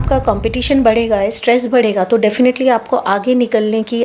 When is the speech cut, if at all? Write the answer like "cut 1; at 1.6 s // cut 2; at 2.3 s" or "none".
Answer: none